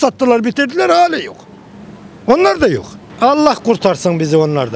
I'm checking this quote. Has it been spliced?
yes; 1 cut; at 3.0 s

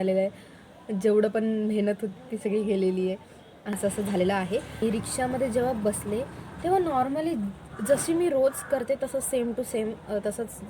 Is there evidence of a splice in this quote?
yes; 2 cuts; at 3.7 s, 4.8 s

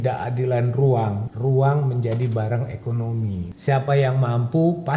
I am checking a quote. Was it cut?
yes; 2 cuts; at 1.3 s, 3.5 s

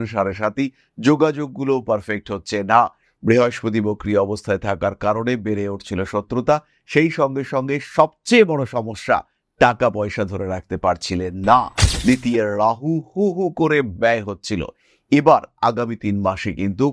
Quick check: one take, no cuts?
yes; 0 cuts

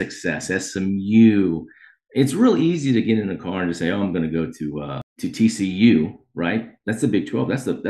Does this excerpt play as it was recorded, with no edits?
no; 1 cut; at 5.0 s

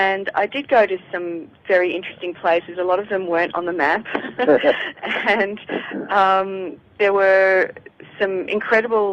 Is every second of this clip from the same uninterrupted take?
no; 1 cut; at 1.1 s

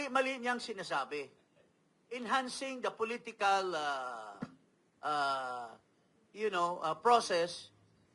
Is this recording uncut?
yes; 0 cuts

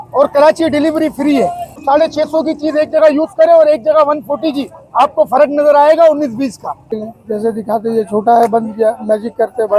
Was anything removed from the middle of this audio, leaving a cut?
yes; 2 cuts; at 1.8 s, 7.0 s

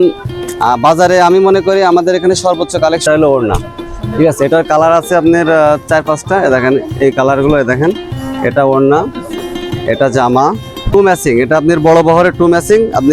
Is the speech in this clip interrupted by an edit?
yes; 2 cuts; at 3.0 s, 10.8 s

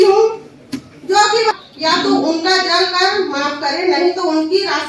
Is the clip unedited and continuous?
no; 1 cut; at 1.5 s

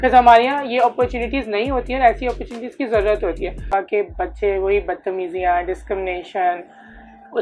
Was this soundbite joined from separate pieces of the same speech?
yes; 1 cut; at 3.7 s

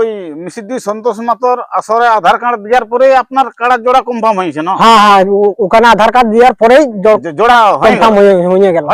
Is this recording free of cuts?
yes; 0 cuts

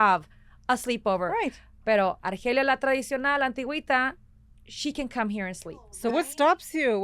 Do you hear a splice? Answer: yes; 1 cut; at 6.0 s

